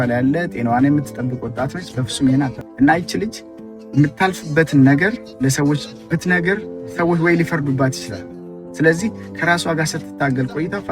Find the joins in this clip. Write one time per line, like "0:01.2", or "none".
0:02.6